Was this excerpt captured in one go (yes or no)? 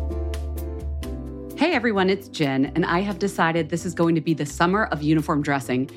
no